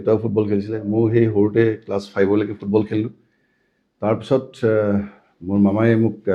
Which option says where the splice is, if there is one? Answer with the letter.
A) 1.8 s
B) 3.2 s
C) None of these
C